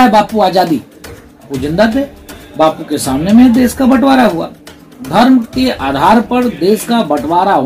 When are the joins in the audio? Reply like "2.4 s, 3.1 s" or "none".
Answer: 1.5 s